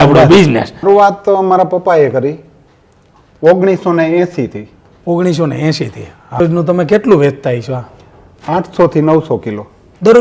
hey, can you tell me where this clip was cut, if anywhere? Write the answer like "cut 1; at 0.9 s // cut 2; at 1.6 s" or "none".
cut 1; at 0.8 s // cut 2; at 6.4 s